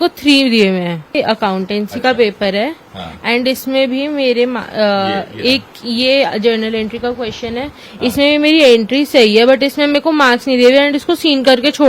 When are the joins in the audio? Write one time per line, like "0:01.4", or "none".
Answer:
0:01.1